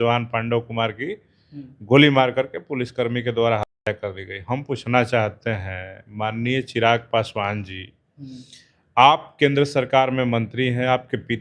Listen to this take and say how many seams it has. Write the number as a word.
zero